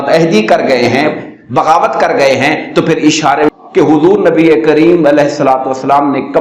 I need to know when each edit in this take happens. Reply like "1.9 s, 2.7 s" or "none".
3.5 s